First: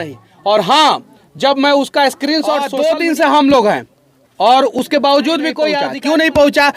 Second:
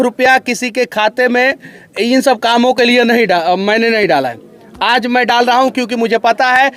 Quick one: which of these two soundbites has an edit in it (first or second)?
first